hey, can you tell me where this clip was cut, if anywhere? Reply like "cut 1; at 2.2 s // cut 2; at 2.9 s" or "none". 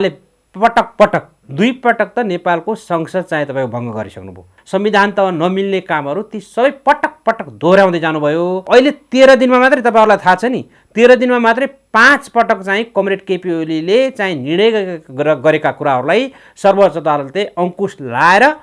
cut 1; at 4.5 s // cut 2; at 8.6 s